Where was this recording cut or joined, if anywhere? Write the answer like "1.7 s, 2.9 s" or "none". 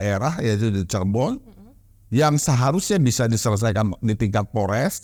none

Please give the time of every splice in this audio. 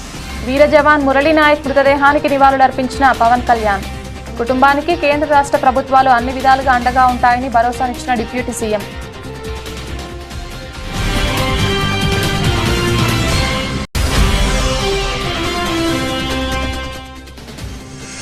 17.0 s

